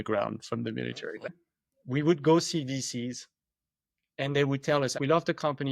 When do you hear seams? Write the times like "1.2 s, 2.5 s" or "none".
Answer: 1.3 s, 4.9 s